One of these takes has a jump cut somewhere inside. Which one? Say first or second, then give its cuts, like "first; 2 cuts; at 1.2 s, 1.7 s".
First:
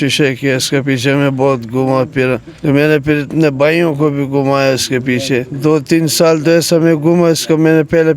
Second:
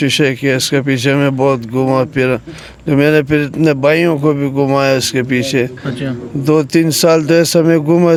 first; 2 cuts; at 2.5 s, 5.5 s